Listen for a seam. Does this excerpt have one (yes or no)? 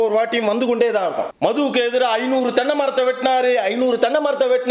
yes